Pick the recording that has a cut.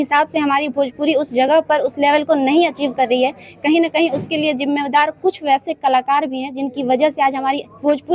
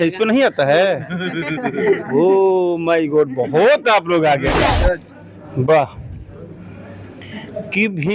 second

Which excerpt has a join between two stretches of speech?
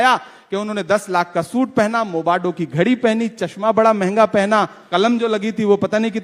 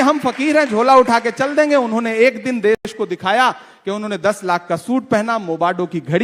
first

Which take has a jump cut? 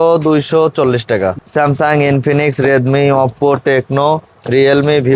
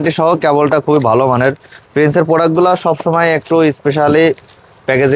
first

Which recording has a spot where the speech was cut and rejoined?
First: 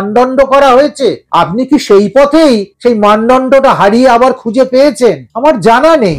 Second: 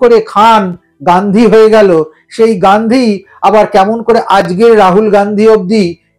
first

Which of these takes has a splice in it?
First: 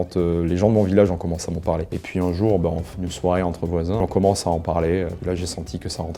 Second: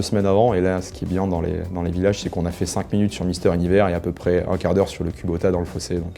first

